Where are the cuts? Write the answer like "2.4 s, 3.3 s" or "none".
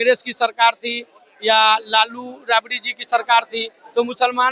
none